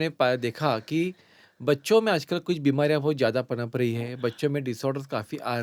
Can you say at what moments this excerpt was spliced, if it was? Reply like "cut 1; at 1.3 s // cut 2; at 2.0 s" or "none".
none